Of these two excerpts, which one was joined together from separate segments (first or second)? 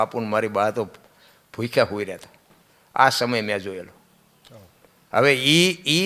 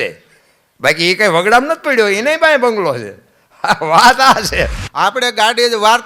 second